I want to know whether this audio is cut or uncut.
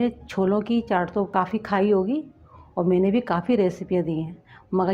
cut